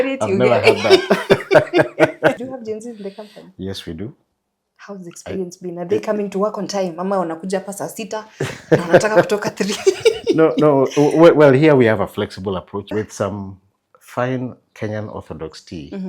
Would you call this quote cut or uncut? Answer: cut